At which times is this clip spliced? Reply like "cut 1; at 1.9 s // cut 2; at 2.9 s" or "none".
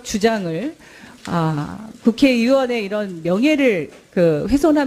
cut 1; at 2.9 s